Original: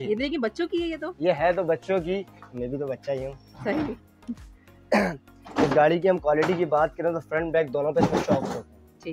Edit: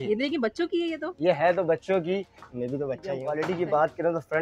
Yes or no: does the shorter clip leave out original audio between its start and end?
yes